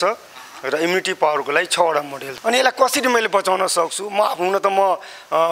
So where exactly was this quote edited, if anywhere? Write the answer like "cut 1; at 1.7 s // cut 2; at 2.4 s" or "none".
cut 1; at 2.2 s